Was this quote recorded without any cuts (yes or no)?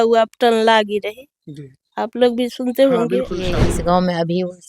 no